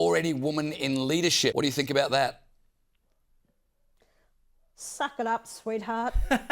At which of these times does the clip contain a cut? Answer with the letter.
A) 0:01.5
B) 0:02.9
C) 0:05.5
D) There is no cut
A